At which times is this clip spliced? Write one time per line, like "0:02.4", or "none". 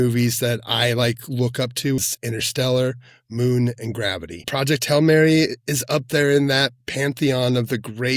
0:02.0
0:04.5